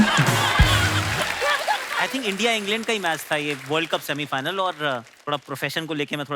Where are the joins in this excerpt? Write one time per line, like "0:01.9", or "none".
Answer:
0:01.9